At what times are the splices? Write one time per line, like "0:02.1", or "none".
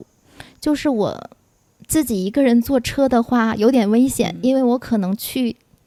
none